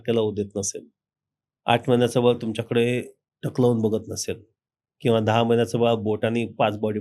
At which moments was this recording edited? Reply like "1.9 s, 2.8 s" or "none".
none